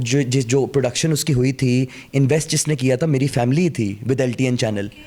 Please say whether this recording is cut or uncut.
uncut